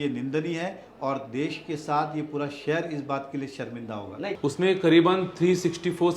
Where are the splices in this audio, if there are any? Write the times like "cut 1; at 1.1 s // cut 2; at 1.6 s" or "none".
cut 1; at 4.3 s

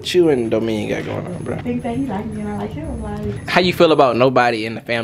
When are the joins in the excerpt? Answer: cut 1; at 1.6 s // cut 2; at 3.3 s

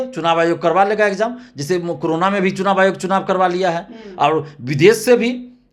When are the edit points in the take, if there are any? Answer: none

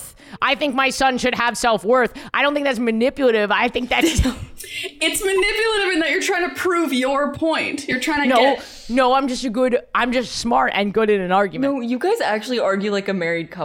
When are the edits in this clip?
cut 1; at 11.6 s

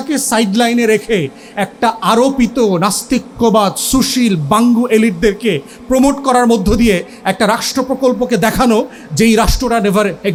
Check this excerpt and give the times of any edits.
none

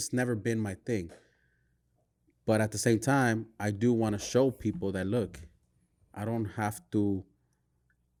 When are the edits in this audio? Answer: none

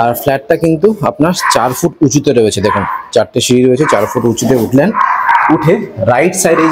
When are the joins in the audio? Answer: none

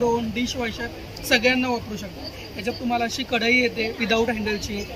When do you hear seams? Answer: none

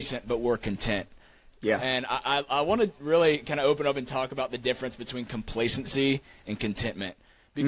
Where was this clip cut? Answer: none

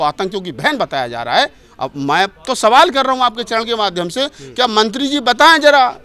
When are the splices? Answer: none

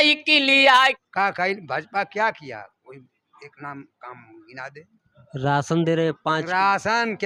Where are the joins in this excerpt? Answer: cut 1; at 1.0 s

